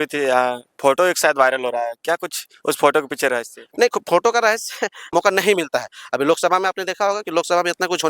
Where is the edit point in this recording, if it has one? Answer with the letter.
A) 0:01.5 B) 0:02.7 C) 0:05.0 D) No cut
C